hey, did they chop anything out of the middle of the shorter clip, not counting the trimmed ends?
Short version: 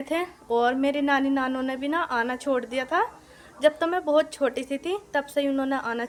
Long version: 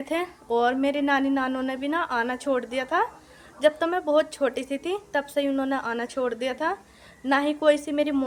no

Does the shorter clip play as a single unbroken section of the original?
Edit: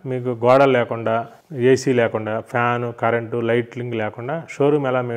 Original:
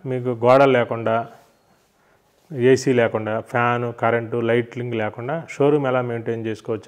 no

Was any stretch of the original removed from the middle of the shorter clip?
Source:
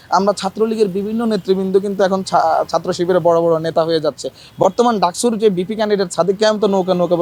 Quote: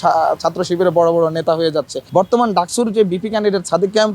yes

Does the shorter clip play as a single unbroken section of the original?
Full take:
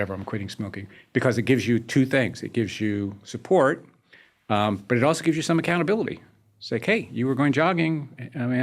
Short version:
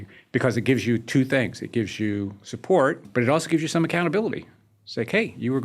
no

